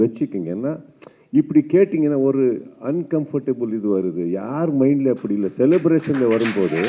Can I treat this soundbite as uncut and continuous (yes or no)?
yes